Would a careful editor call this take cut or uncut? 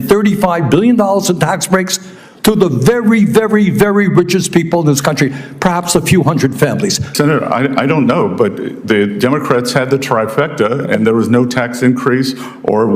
cut